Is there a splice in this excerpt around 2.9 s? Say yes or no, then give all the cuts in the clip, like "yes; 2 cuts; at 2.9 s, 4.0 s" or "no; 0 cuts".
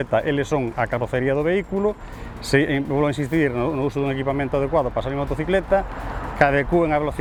no; 0 cuts